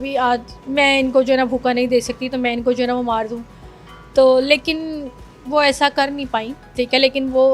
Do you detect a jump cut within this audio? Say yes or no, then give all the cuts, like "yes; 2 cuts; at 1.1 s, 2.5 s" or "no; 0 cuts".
no; 0 cuts